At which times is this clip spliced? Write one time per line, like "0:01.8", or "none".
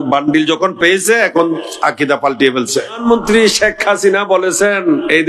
0:03.0